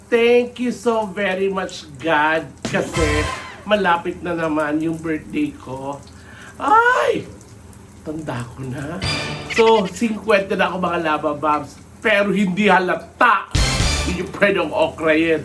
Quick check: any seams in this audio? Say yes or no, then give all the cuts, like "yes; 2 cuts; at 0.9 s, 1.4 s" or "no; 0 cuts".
no; 0 cuts